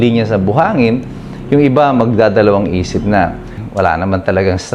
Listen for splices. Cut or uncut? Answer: cut